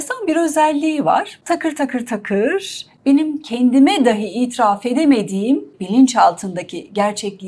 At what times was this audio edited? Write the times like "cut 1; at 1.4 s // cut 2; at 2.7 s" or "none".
cut 1; at 1.3 s // cut 2; at 5.8 s

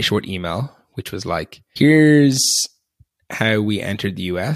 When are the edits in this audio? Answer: cut 1; at 1.6 s

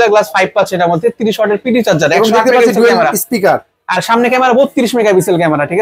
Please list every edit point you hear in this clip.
none

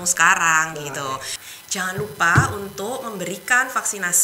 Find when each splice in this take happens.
cut 1; at 1.4 s

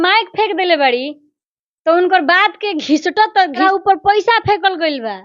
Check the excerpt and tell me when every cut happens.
cut 1; at 3.6 s

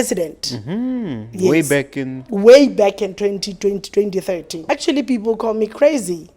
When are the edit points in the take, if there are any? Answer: cut 1; at 4.5 s

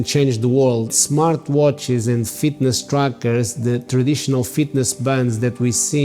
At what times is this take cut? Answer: cut 1; at 1.0 s

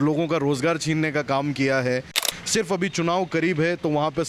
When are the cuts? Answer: cut 1; at 2.2 s

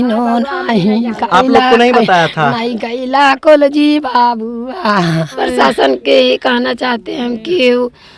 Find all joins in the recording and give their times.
cut 1; at 5.3 s

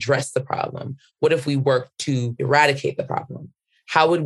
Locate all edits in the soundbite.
none

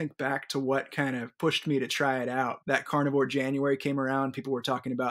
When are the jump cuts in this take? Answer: cut 1; at 2.6 s

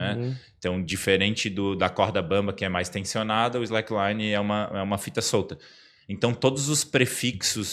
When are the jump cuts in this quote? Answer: none

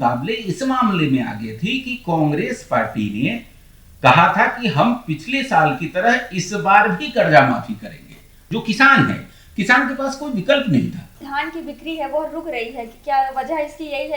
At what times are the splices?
cut 1; at 8.3 s // cut 2; at 11.2 s

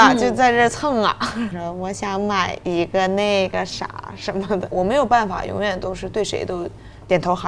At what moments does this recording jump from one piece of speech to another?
cut 1; at 1.5 s // cut 2; at 4.7 s

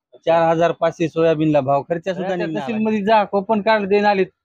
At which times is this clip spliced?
cut 1; at 2.4 s

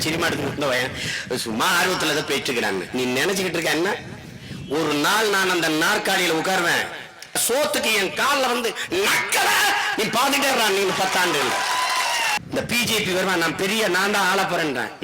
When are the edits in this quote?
cut 1; at 7.4 s // cut 2; at 12.4 s

